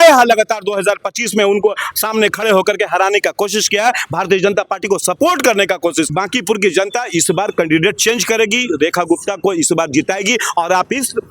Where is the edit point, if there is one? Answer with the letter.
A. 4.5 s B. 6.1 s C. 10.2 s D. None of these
B